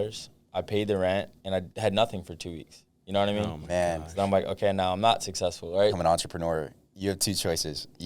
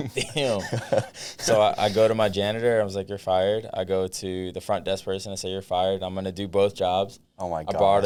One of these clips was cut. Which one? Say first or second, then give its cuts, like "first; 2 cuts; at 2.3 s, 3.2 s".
first; 2 cuts; at 1.7 s, 6.0 s